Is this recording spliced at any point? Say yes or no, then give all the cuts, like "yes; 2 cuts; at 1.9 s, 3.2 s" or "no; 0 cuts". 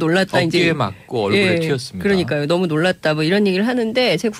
yes; 1 cut; at 1.7 s